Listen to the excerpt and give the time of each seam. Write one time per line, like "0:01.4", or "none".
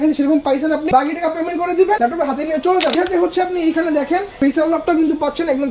0:00.9
0:02.0
0:03.0
0:04.3